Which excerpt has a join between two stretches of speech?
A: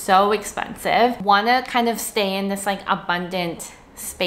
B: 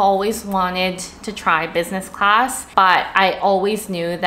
A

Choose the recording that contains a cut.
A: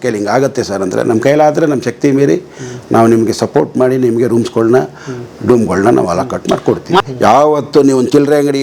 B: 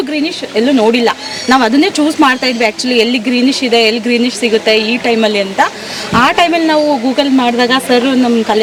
A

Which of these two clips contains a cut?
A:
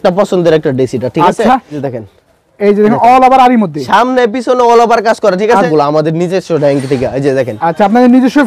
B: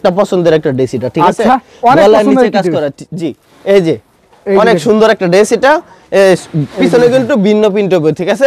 A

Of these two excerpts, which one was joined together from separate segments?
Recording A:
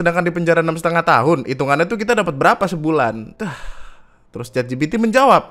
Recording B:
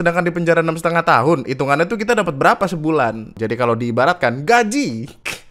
B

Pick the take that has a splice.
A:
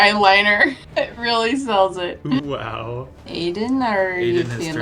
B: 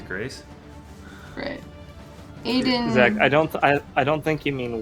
A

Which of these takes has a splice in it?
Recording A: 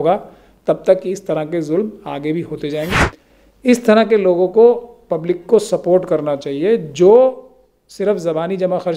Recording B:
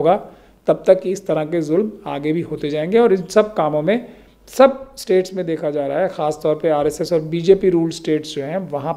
A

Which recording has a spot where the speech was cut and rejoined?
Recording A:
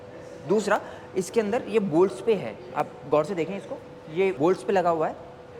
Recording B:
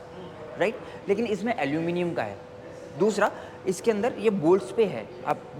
A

